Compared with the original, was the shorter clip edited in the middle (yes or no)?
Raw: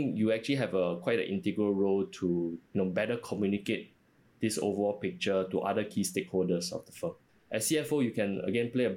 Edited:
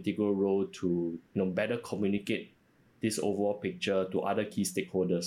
no